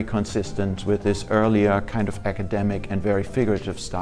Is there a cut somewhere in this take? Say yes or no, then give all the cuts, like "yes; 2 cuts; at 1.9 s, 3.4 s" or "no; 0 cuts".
no; 0 cuts